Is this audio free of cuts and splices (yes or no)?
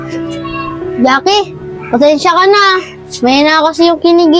no